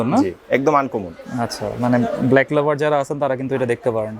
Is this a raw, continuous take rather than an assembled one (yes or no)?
yes